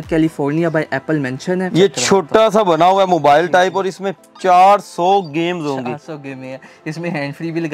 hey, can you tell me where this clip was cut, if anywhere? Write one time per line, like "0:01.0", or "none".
0:01.7